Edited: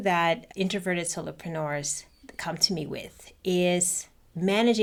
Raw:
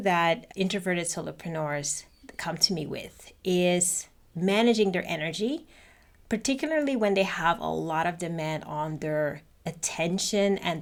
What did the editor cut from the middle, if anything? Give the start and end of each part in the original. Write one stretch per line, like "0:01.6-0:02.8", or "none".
none